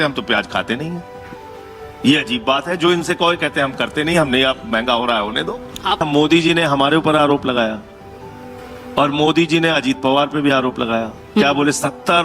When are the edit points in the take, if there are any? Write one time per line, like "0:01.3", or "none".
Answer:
0:05.6
0:11.3